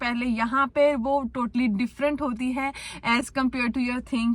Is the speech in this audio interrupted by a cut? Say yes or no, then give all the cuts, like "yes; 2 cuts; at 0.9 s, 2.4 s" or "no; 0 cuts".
no; 0 cuts